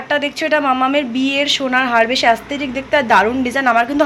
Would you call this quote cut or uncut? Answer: uncut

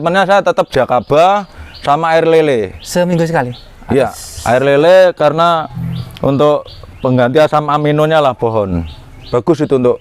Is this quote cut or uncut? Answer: uncut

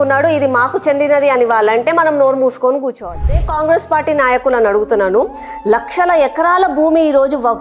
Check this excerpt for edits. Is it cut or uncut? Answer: cut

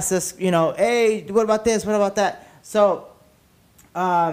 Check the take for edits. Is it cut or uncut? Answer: uncut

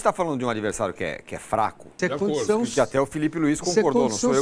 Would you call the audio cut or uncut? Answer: cut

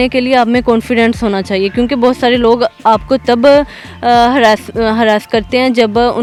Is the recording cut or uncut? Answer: uncut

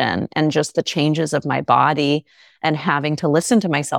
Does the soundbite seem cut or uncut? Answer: uncut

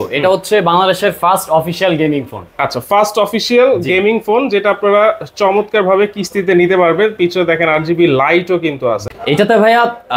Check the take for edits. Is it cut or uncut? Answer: uncut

